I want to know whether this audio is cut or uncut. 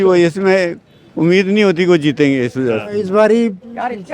cut